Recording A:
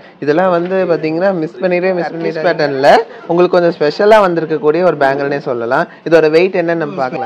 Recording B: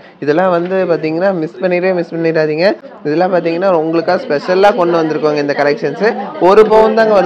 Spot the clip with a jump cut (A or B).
A